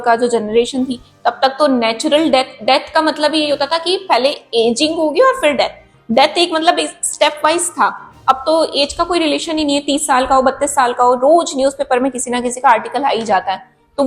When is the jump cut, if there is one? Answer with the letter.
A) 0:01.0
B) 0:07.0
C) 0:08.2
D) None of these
D